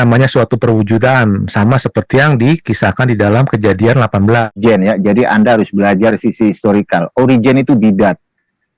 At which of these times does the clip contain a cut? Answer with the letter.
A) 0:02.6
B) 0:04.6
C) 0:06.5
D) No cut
B